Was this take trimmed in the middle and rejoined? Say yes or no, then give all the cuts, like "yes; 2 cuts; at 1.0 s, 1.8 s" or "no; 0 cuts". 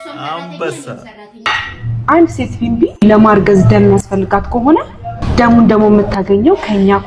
yes; 1 cut; at 1.5 s